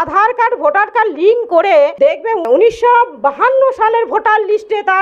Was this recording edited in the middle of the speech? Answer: yes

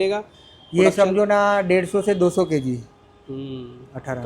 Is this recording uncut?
yes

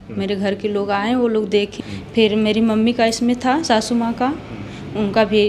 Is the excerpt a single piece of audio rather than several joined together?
no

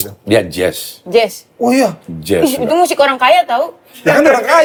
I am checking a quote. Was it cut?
no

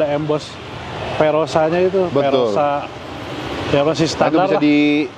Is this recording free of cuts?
yes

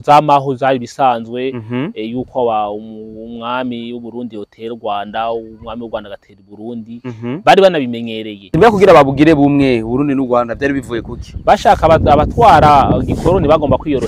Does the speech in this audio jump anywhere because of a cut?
yes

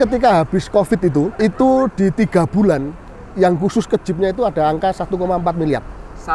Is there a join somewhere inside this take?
yes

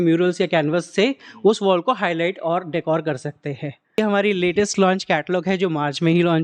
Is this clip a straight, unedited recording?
no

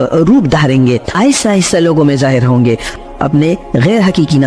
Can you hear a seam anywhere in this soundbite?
yes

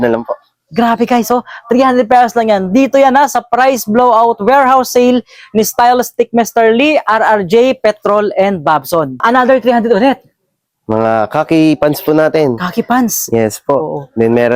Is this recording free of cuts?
yes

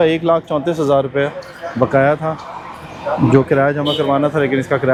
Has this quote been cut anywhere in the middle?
no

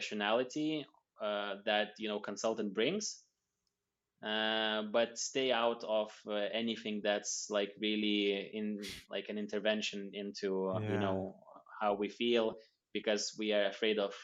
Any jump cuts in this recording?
no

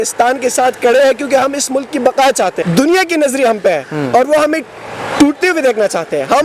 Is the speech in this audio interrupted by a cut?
yes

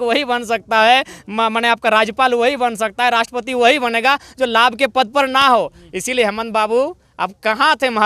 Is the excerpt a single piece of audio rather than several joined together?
yes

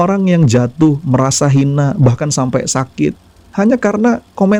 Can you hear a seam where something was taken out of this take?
no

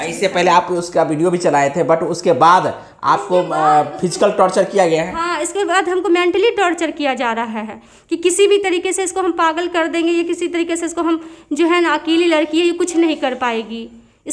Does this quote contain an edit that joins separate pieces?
no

